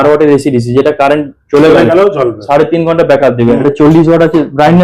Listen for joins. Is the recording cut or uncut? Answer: cut